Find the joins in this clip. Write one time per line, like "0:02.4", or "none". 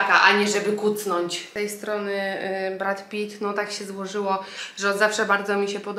0:01.5